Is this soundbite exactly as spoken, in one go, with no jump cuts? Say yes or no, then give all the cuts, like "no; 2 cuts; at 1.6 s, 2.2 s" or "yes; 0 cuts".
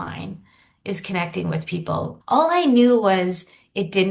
no; 1 cut; at 2.2 s